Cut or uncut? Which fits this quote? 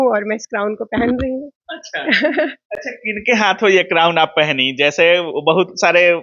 uncut